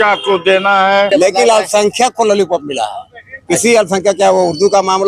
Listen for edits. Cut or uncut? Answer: cut